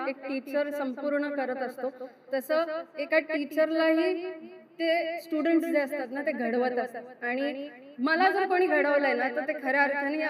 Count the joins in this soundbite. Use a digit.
0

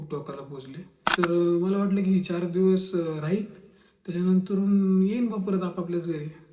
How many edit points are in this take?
1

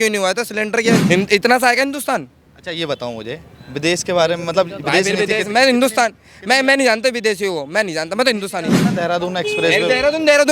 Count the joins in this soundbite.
2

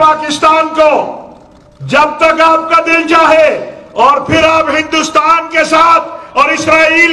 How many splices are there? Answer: 0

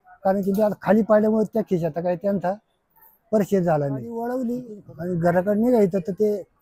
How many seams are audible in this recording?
1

